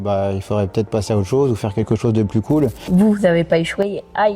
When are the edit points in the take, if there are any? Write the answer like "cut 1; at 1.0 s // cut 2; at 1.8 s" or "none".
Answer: cut 1; at 2.9 s